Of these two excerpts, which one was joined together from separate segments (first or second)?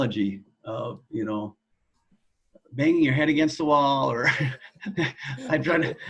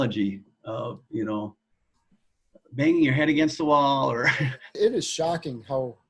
second